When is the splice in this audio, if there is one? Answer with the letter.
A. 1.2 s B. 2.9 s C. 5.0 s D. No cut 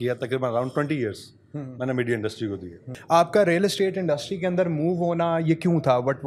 B